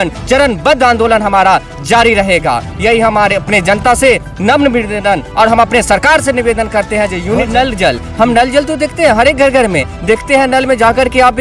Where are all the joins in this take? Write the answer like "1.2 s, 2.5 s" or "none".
7.4 s

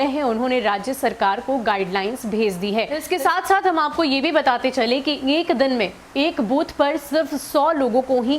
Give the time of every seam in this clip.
3.0 s

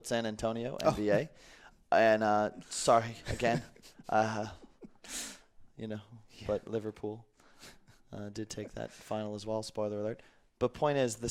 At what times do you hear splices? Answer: none

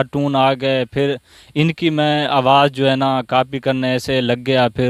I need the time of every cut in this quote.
none

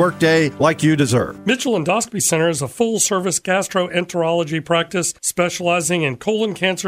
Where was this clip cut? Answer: 1.3 s

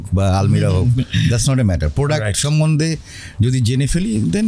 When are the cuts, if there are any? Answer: none

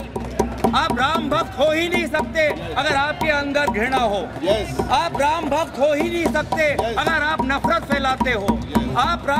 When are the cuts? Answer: none

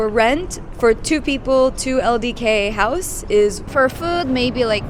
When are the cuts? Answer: 3.6 s

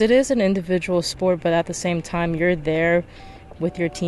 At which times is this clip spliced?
none

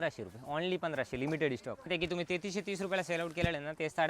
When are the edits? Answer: 1.9 s

